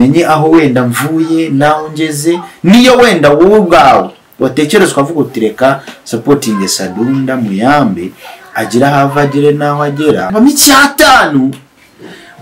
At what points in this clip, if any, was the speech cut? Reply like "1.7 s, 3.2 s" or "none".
10.3 s